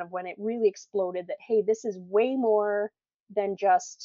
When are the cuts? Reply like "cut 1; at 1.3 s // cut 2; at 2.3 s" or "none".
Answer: none